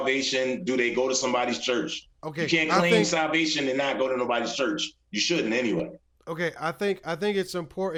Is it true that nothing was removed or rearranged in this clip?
yes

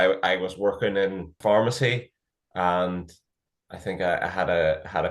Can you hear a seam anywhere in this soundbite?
yes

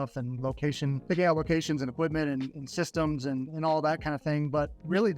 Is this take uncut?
no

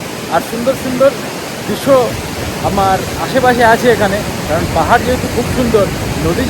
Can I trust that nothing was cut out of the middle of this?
yes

